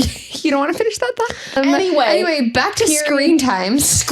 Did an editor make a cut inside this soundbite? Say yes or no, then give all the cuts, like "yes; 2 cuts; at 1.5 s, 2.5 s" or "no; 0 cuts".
yes; 1 cut; at 1.6 s